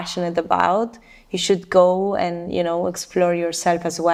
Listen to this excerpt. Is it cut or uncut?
uncut